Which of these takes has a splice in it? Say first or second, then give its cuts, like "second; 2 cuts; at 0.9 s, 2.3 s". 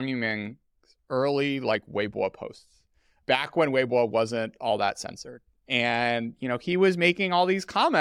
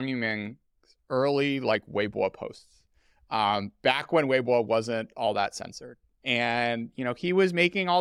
first; 1 cut; at 3.2 s